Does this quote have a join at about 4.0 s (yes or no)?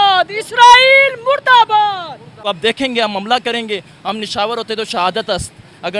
no